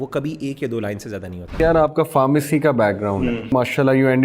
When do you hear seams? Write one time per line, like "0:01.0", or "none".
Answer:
0:01.6
0:03.5